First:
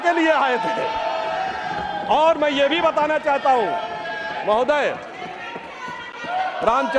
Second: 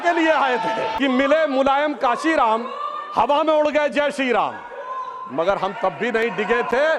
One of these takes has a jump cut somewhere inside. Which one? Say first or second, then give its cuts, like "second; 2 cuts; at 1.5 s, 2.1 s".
second; 1 cut; at 0.9 s